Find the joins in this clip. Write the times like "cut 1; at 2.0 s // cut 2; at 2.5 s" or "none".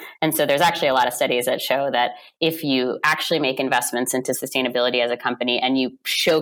none

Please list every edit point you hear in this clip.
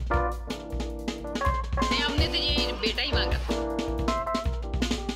none

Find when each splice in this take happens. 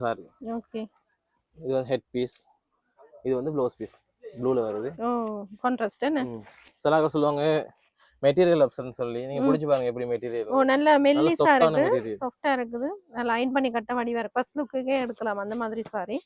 none

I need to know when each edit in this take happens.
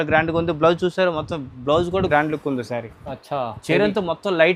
cut 1; at 2.1 s

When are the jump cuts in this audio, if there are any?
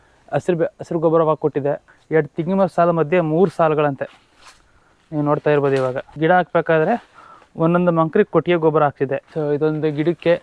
cut 1; at 1.9 s // cut 2; at 6.1 s // cut 3; at 9.2 s

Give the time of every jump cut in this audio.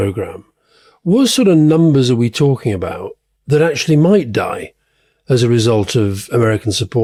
none

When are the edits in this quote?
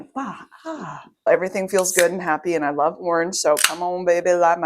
cut 1; at 1.3 s

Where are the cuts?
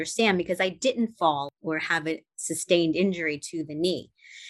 cut 1; at 1.5 s

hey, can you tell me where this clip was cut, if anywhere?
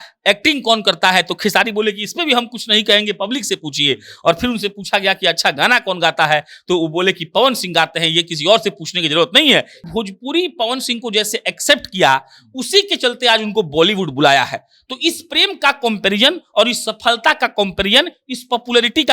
cut 1; at 9.8 s

